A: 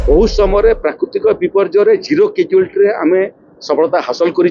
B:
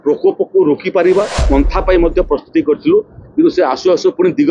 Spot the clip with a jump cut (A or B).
B